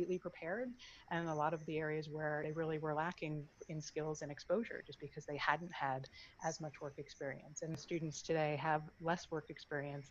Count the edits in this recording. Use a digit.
2